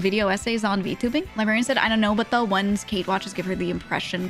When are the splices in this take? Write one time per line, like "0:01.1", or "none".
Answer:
0:01.3